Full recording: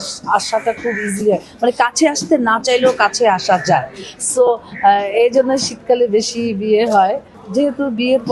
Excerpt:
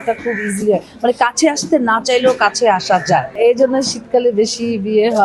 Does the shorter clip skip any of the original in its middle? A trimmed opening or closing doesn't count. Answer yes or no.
yes